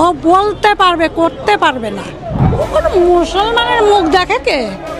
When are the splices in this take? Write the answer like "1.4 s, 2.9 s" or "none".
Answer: 2.4 s